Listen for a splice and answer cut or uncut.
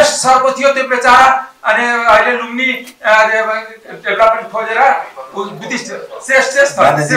uncut